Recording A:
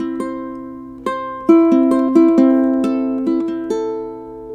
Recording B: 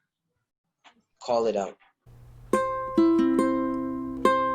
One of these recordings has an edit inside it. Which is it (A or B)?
B